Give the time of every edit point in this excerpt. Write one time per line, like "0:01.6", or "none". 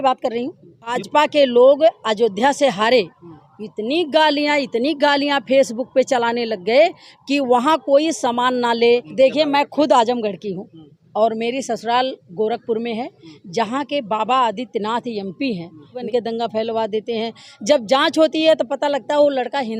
0:01.0
0:09.1
0:16.0